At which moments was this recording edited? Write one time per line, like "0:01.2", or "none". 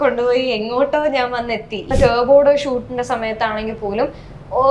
0:01.9